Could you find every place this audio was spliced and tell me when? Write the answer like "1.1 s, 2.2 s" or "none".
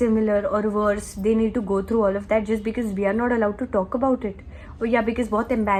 none